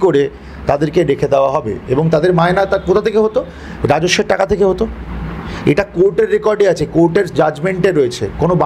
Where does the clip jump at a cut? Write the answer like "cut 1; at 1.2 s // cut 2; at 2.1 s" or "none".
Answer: none